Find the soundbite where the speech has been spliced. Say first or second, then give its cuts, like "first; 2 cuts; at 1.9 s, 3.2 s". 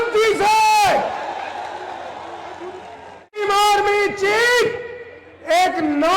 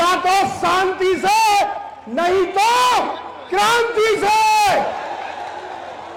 first; 1 cut; at 3.4 s